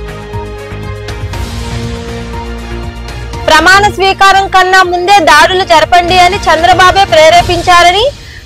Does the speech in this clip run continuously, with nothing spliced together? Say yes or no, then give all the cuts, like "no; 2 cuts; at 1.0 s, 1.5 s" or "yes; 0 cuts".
no; 1 cut; at 1.2 s